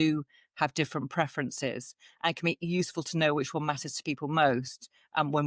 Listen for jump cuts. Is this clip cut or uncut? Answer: uncut